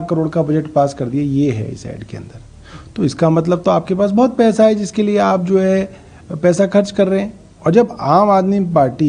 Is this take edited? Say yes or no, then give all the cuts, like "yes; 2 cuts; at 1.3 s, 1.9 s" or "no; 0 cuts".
no; 0 cuts